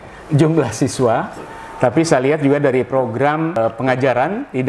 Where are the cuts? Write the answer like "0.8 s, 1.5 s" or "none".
3.6 s

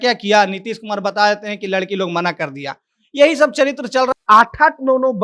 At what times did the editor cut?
4.1 s

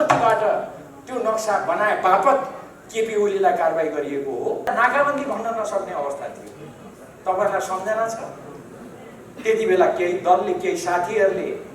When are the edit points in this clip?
4.7 s

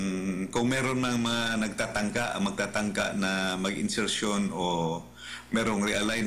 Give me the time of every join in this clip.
none

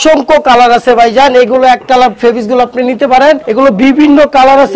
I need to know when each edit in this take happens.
3.5 s

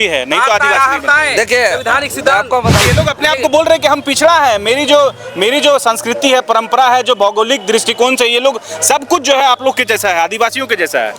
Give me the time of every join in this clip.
2.8 s

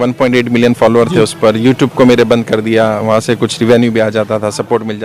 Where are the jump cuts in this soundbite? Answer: none

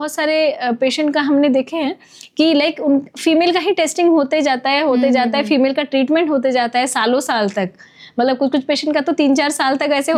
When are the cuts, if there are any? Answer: none

